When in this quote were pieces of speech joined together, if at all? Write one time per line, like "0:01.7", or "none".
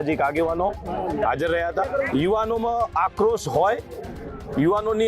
0:02.1